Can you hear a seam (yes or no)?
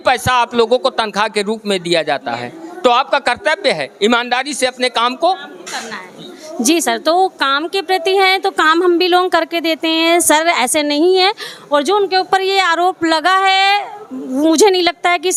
no